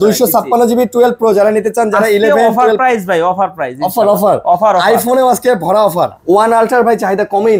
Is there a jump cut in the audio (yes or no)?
yes